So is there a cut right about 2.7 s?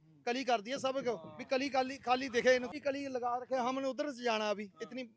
yes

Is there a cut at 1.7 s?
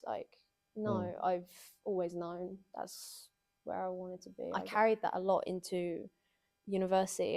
no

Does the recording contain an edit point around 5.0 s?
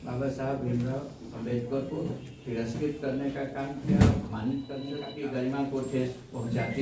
yes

